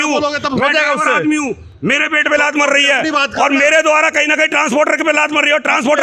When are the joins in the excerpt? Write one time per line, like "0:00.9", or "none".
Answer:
none